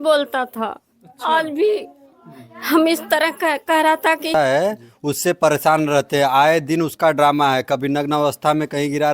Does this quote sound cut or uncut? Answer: cut